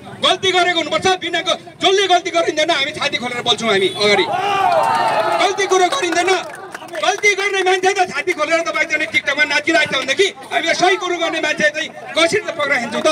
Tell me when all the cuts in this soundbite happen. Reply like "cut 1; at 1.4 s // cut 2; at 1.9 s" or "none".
none